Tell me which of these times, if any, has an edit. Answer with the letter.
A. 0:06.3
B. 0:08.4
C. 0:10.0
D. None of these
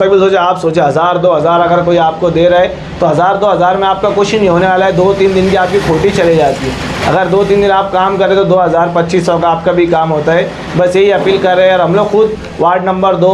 D